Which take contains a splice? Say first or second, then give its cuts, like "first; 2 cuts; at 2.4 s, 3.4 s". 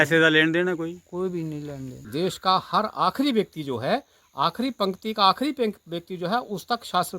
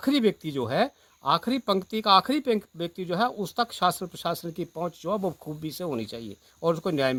first; 1 cut; at 2.0 s